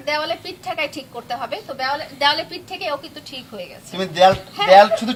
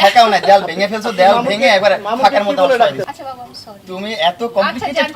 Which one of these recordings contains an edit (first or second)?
second